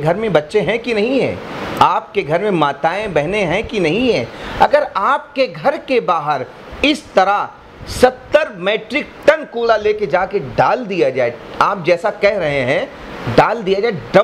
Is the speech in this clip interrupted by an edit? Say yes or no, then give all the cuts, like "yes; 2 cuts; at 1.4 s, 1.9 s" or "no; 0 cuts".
no; 0 cuts